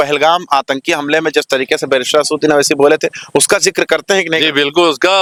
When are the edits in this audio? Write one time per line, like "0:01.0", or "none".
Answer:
none